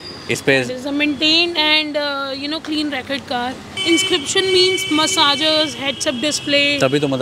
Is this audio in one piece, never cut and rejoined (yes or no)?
no